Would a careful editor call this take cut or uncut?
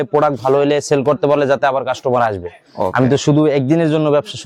uncut